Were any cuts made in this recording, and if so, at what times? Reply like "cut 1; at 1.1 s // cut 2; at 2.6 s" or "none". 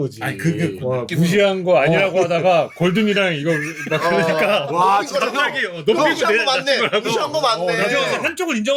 none